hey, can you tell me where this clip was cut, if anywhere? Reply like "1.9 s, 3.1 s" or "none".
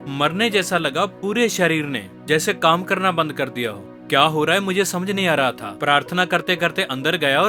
none